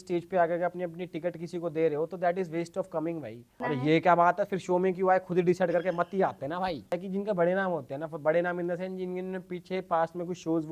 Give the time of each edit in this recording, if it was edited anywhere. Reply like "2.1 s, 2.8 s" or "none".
3.5 s, 7.0 s